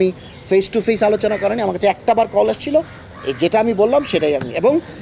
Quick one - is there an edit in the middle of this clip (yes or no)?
no